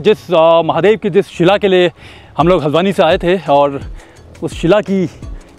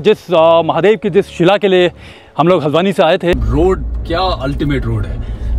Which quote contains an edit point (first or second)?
second